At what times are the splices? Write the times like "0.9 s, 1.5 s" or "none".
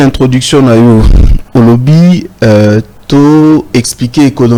none